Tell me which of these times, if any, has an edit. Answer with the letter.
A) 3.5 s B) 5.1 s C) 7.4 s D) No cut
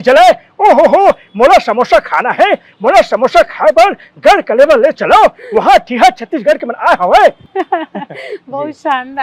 C